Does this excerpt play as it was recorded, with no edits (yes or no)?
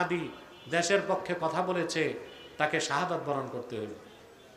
yes